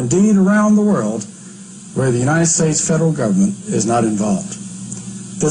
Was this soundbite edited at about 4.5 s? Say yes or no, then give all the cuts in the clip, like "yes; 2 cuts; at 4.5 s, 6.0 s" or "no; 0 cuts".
no; 1 cut; at 3.1 s